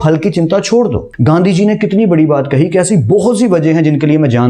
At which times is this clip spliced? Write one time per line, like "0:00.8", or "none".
0:01.1